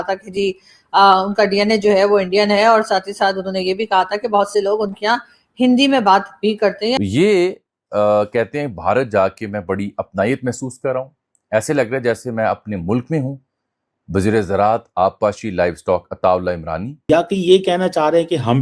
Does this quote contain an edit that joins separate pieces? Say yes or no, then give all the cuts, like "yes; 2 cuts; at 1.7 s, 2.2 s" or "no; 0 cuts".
yes; 2 cuts; at 7.0 s, 16.9 s